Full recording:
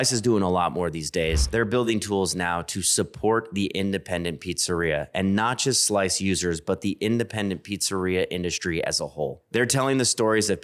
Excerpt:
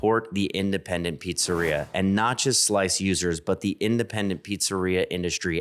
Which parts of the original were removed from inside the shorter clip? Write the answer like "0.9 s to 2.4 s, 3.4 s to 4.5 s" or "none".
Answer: none